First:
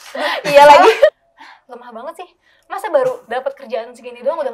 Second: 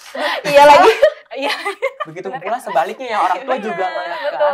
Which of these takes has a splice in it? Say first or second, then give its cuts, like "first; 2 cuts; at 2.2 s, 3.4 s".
first; 1 cut; at 1.2 s